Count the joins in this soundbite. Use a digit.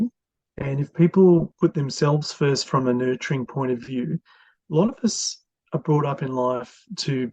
1